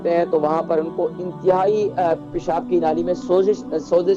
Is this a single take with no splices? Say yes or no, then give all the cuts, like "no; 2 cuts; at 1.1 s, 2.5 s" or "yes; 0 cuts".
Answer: yes; 0 cuts